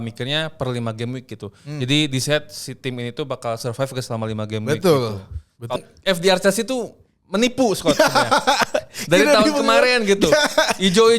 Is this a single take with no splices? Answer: no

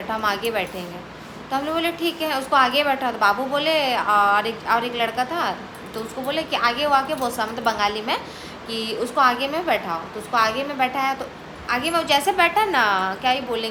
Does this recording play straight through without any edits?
yes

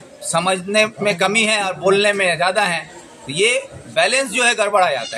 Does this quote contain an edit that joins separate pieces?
no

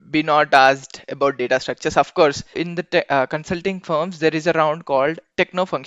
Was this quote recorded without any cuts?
no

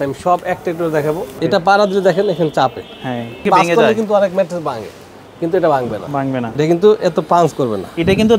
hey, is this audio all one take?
no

